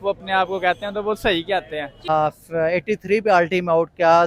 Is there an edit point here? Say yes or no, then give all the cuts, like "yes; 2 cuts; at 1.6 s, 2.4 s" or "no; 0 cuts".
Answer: yes; 1 cut; at 2.1 s